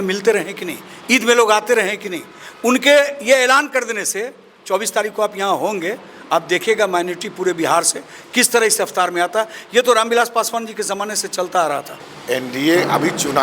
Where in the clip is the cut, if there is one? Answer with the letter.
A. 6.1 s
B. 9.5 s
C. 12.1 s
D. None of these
C